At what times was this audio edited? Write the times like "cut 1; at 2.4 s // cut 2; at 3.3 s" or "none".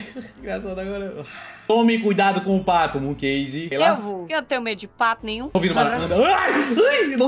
cut 1; at 1.7 s // cut 2; at 5.5 s

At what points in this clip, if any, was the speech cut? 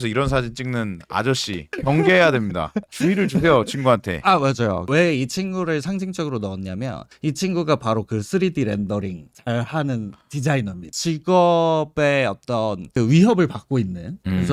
none

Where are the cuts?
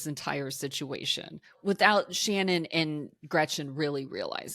cut 1; at 1.5 s

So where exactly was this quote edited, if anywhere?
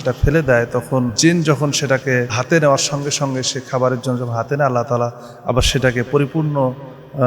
cut 1; at 1.1 s // cut 2; at 2.4 s

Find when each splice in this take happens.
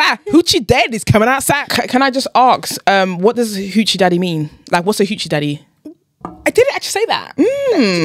cut 1; at 1.6 s

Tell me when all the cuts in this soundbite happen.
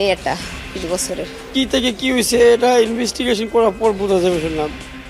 cut 1; at 1.4 s

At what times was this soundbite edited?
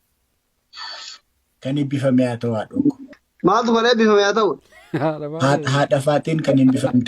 cut 1; at 3.0 s

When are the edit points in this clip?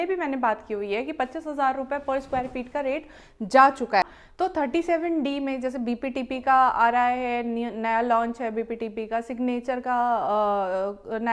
cut 1; at 4.0 s

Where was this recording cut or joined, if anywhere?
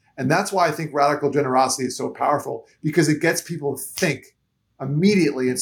none

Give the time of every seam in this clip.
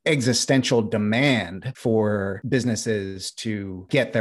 none

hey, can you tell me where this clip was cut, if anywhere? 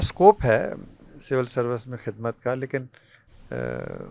none

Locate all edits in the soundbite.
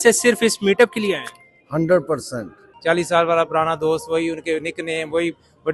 cut 1; at 2.7 s

